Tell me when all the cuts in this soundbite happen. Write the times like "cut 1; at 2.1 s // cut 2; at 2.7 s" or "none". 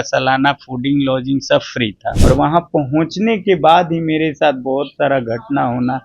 cut 1; at 2.1 s